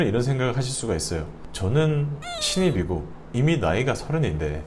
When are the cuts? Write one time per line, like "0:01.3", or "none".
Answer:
0:01.3